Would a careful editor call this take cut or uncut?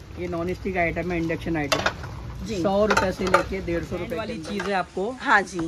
cut